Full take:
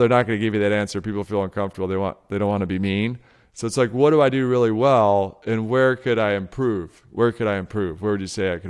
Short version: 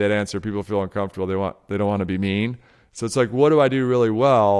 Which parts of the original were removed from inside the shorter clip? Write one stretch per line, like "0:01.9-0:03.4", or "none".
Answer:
none